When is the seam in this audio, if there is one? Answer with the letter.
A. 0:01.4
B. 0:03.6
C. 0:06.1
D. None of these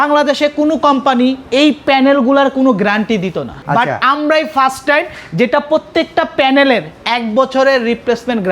B